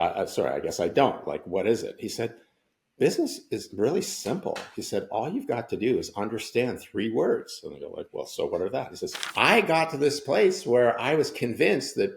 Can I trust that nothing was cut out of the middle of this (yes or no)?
no